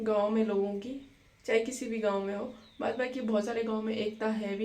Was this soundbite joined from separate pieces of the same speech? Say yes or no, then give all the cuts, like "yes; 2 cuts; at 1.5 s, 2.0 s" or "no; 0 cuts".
no; 0 cuts